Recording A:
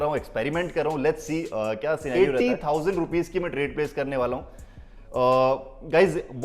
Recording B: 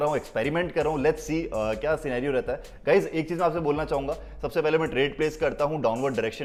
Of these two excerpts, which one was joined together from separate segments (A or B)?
A